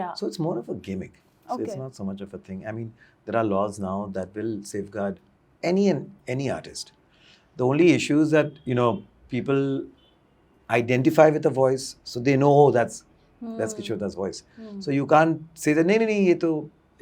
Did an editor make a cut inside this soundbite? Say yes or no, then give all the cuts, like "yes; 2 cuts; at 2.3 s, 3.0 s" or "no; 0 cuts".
no; 0 cuts